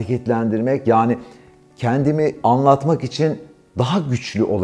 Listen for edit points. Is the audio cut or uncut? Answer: uncut